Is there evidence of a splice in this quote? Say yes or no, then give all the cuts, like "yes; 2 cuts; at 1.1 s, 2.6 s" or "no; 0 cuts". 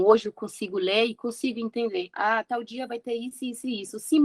yes; 1 cut; at 2.1 s